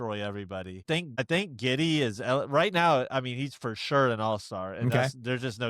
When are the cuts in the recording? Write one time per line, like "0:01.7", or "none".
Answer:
0:01.2